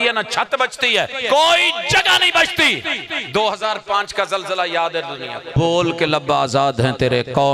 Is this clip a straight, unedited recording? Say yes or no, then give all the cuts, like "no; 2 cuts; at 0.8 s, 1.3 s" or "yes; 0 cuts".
no; 2 cuts; at 1.2 s, 5.5 s